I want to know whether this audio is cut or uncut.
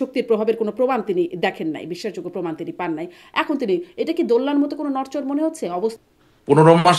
cut